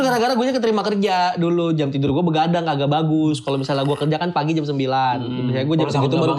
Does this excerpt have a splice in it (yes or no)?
no